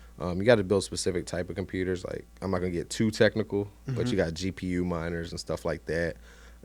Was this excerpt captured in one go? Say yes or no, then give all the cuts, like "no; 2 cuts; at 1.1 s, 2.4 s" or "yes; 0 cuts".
yes; 0 cuts